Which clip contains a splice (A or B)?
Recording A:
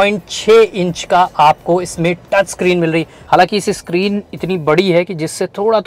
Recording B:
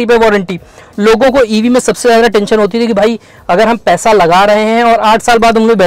A